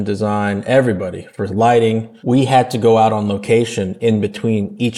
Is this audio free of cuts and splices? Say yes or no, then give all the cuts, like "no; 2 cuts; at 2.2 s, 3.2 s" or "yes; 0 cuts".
yes; 0 cuts